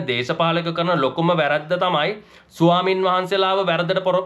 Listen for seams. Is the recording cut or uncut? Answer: uncut